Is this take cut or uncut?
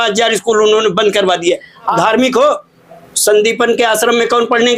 cut